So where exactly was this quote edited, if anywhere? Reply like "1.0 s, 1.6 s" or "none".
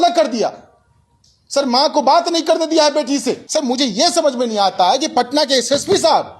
3.4 s